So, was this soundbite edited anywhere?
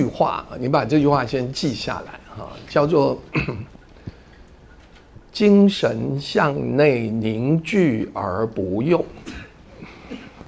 no; 0 cuts

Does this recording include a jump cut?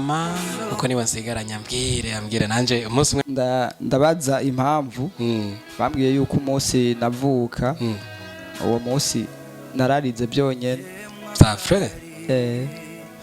yes; 1 cut; at 3.2 s

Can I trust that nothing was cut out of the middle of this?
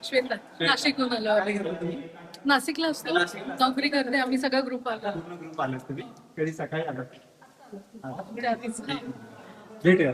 yes; 0 cuts

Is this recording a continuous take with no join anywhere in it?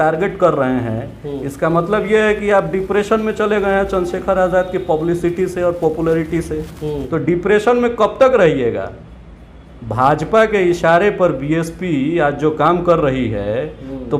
yes; 0 cuts

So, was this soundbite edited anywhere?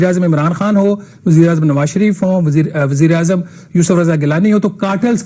no; 0 cuts

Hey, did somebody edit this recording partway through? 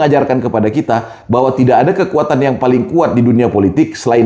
no; 0 cuts

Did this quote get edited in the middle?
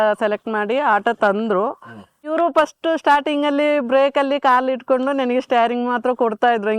yes; 1 cut; at 2.3 s

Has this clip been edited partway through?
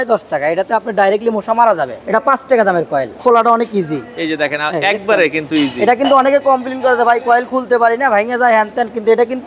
yes; 2 cuts; at 1.9 s, 3.1 s

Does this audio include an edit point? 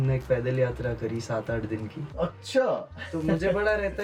no; 0 cuts

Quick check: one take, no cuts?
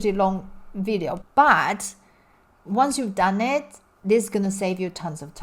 no; 1 cut; at 1.2 s

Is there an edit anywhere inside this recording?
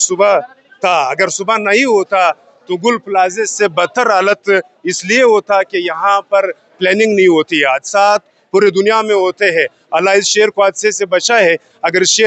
no; 0 cuts

